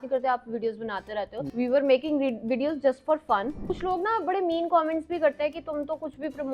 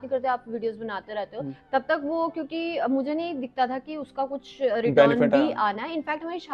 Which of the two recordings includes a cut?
first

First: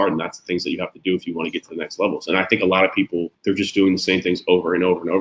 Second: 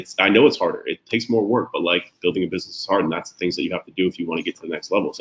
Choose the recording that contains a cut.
first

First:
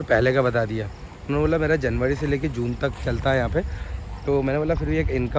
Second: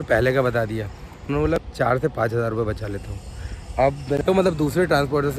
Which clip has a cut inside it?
second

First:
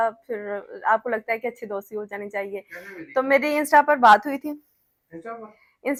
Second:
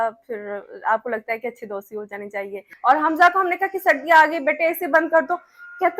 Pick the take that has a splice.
second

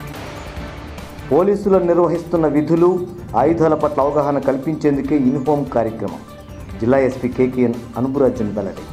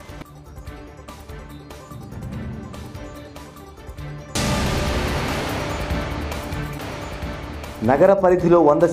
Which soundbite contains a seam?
second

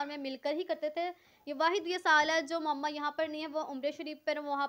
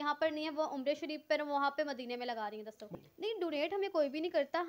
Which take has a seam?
second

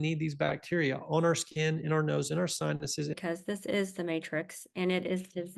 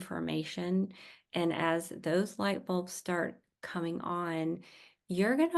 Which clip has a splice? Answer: first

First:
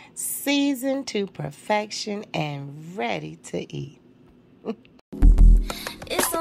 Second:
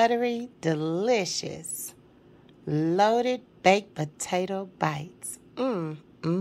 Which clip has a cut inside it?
first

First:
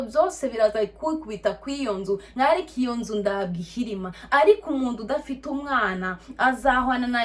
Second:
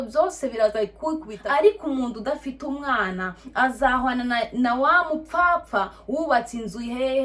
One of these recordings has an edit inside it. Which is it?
second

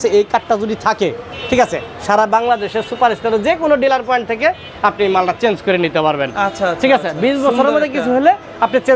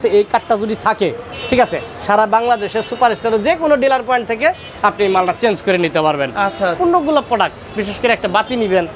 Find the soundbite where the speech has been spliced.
second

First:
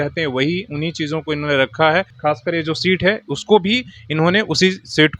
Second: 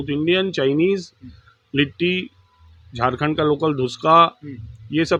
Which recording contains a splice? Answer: first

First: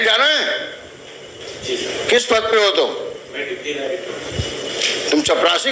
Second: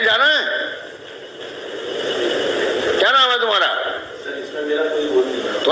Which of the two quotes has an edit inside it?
first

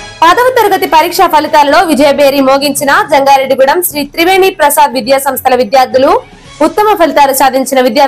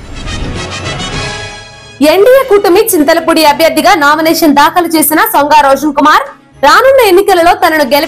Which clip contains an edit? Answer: second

